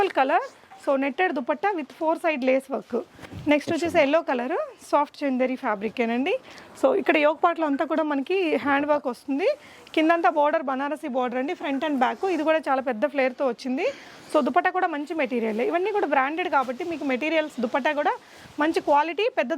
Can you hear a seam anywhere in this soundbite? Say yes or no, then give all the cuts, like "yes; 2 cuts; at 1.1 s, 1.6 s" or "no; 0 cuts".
no; 0 cuts